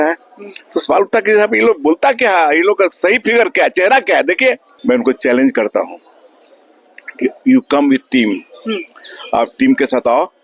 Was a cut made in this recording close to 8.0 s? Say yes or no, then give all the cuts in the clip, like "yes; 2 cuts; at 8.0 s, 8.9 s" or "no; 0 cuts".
no; 1 cut; at 4.7 s